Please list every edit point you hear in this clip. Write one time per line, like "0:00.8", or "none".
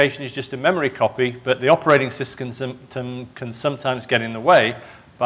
0:03.8

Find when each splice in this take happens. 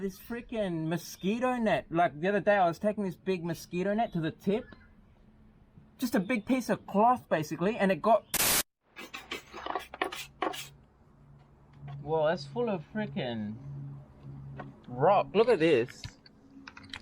0:08.4

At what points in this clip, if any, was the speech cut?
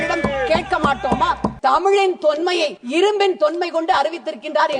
0:01.5
0:02.8

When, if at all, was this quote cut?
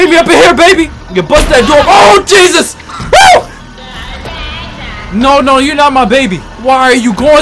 0:01.0
0:03.6
0:06.5

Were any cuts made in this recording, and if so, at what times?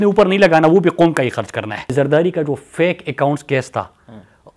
0:01.9

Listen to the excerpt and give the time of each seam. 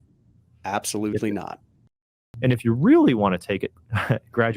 0:01.8

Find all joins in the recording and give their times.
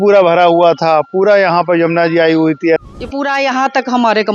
0:02.8

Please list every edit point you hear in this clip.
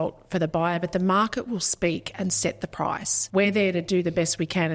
0:03.1

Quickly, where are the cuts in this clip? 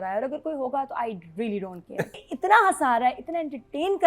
0:02.3

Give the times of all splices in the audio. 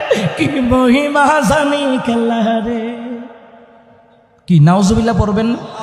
none

